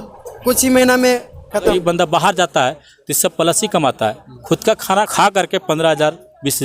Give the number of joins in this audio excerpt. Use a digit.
2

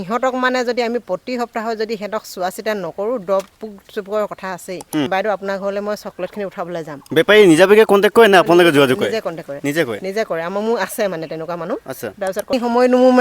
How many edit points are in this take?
2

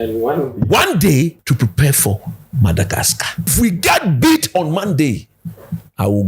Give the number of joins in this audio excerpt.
2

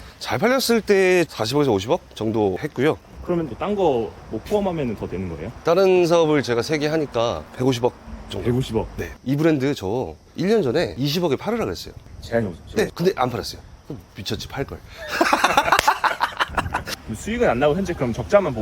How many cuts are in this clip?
5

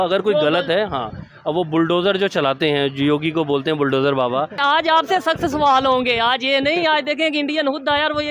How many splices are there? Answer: 1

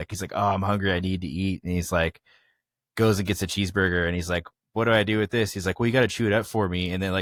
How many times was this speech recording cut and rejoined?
0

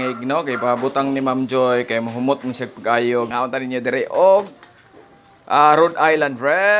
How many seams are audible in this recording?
1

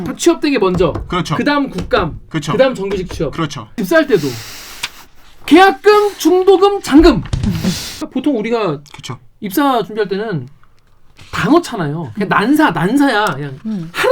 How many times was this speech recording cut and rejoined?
2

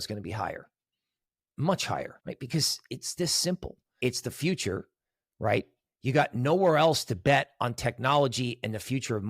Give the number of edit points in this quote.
2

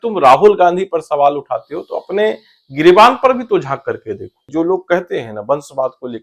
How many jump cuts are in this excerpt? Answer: 1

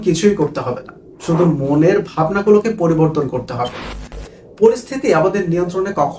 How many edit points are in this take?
1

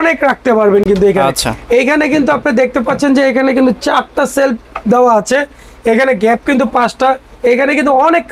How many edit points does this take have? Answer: 0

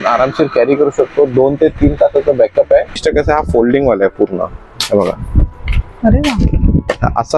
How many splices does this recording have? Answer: 1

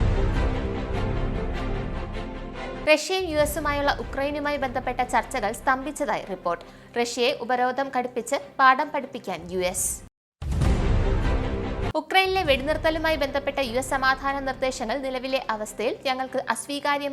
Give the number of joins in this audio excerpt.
1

